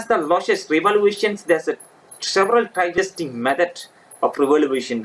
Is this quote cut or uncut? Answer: uncut